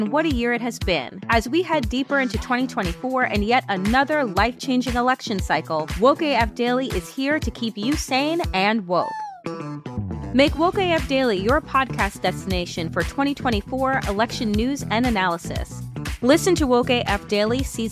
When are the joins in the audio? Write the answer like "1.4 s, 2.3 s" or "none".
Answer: none